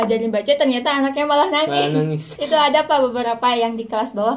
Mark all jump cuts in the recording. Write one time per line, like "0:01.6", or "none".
0:02.2